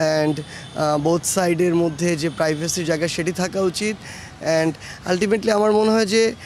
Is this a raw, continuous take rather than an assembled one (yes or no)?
yes